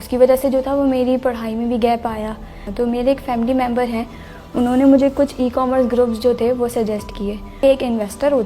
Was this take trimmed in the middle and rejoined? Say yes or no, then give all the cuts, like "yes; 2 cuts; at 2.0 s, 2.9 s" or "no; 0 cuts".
yes; 2 cuts; at 2.6 s, 7.6 s